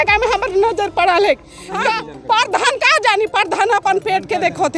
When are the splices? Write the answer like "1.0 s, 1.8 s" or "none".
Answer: 1.9 s